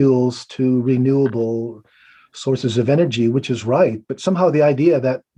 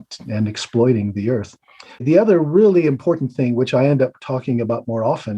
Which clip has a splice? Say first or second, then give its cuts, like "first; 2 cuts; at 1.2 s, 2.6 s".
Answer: second; 1 cut; at 2.0 s